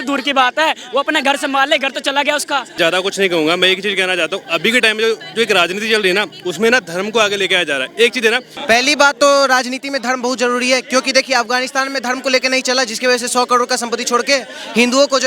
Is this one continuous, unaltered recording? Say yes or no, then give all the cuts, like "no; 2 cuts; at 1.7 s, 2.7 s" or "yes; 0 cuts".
no; 2 cuts; at 2.8 s, 8.5 s